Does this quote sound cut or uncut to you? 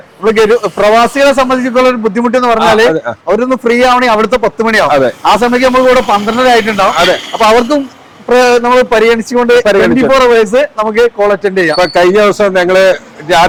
uncut